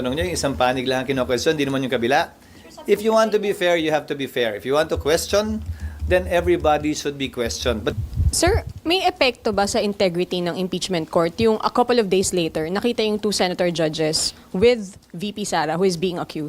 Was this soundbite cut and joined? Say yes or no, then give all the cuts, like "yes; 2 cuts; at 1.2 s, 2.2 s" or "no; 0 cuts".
yes; 1 cut; at 7.9 s